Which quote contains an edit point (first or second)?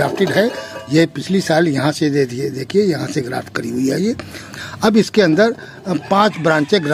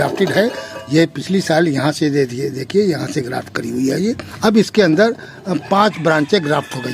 second